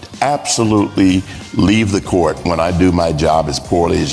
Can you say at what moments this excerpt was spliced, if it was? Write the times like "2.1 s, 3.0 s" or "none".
none